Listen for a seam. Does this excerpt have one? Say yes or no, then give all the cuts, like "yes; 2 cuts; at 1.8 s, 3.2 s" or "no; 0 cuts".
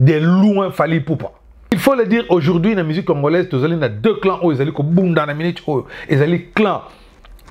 yes; 1 cut; at 1.7 s